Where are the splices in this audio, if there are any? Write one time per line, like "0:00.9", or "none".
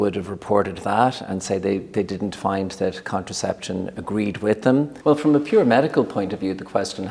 0:04.9